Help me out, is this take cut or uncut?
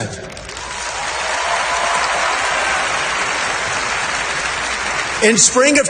cut